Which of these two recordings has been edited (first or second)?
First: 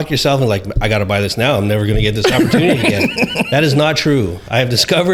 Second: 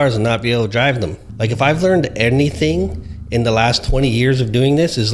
second